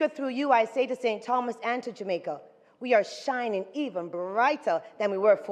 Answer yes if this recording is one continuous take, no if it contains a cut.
yes